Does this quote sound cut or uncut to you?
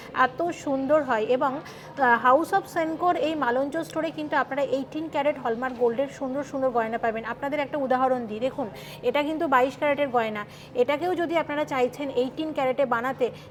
uncut